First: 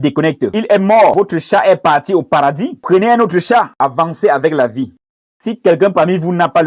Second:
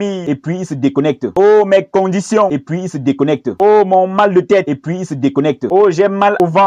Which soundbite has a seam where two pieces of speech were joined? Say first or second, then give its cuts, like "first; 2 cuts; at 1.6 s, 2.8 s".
first; 2 cuts; at 3.8 s, 4.9 s